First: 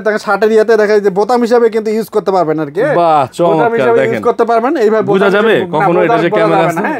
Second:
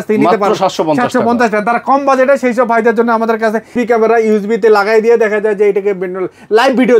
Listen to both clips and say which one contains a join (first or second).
second